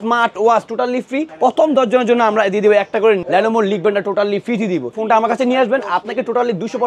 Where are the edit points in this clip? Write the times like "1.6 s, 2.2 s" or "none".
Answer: 1.3 s, 3.2 s, 5.0 s